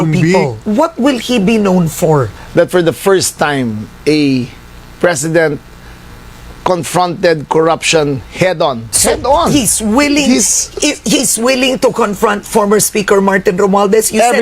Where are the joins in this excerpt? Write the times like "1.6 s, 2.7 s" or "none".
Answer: 2.3 s, 8.9 s